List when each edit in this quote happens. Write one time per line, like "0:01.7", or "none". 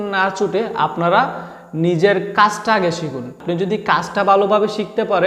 0:03.4